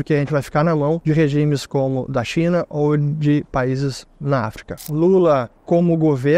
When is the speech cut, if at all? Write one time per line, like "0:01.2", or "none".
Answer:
0:01.0
0:04.8